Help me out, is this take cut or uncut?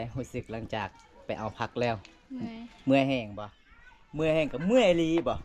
uncut